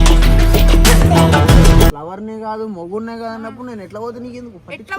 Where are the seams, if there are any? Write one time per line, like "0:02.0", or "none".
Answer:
0:02.0